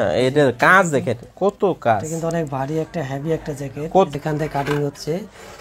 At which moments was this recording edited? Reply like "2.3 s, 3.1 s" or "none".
4.1 s